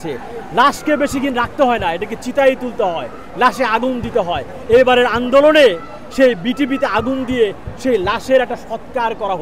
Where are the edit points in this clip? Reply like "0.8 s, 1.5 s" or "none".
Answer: none

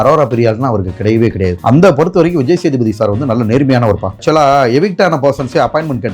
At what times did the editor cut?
1.6 s, 4.2 s

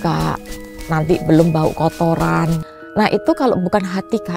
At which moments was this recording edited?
2.7 s

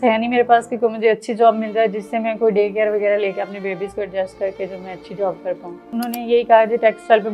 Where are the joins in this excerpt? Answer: 5.9 s

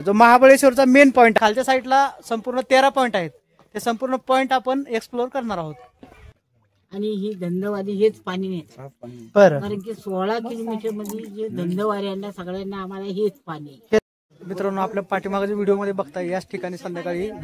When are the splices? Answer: 1.3 s, 6.1 s, 14.1 s

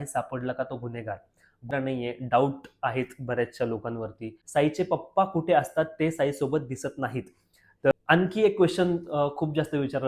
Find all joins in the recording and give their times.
1.7 s, 4.3 s, 7.9 s

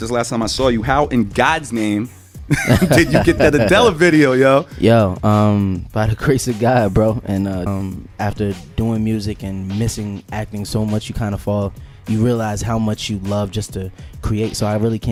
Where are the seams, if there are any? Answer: none

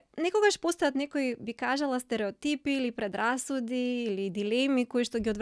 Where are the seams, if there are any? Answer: none

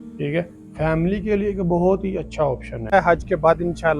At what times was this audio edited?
2.9 s

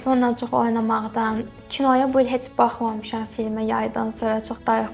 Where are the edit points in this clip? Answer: none

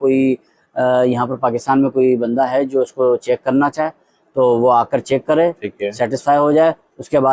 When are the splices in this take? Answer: none

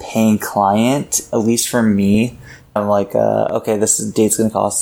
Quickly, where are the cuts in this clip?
2.8 s

